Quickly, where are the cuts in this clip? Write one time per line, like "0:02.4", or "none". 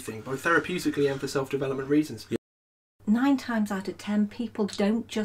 0:02.4